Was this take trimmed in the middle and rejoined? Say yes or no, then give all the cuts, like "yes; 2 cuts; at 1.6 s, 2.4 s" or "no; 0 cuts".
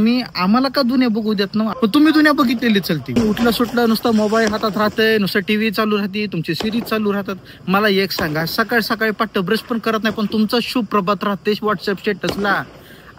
yes; 2 cuts; at 1.7 s, 3.1 s